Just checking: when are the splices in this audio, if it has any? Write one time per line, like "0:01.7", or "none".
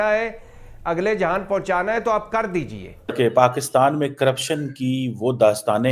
0:03.1